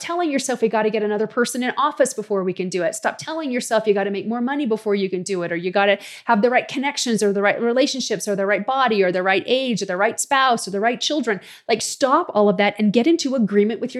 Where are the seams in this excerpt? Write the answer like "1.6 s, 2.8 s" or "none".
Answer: none